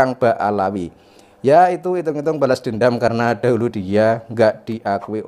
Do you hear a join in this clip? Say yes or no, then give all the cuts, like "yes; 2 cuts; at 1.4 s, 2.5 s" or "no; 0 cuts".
no; 0 cuts